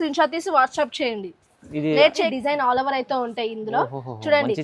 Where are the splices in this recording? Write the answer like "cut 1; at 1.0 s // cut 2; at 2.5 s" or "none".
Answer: cut 1; at 2.3 s